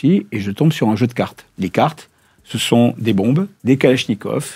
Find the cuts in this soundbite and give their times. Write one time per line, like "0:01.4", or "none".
0:01.4
0:03.5